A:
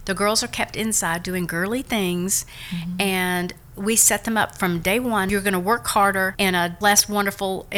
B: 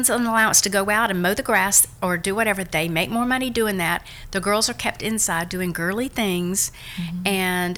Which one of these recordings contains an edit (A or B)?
A